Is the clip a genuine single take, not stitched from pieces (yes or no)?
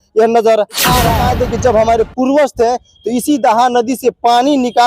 no